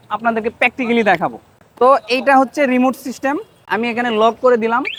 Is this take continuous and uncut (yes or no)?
yes